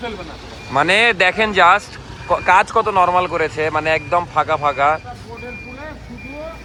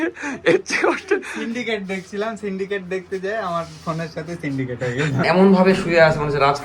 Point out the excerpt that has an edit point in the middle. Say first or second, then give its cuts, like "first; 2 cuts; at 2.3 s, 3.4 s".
second; 1 cut; at 5.2 s